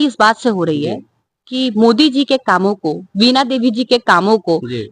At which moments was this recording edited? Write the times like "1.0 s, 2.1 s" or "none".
none